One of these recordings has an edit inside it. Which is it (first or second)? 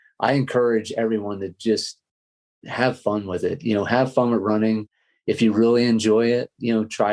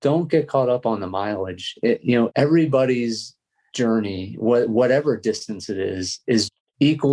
second